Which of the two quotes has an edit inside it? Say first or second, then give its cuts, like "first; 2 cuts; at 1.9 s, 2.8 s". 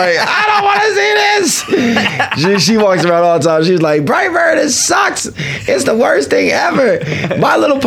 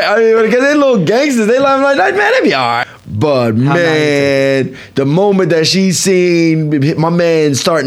second; 1 cut; at 2.8 s